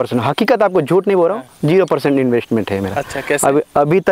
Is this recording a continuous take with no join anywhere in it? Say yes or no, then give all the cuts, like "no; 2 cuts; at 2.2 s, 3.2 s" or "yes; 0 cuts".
yes; 0 cuts